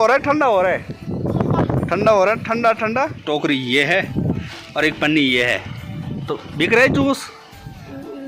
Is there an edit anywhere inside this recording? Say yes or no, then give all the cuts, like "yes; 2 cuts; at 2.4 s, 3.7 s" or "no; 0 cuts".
yes; 1 cut; at 3.2 s